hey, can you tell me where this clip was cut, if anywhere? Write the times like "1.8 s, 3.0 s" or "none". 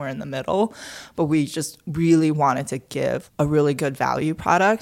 3.3 s